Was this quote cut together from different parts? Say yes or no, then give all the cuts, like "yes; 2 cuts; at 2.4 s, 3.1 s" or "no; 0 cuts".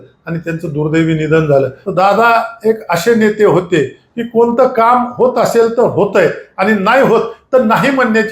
yes; 1 cut; at 1.8 s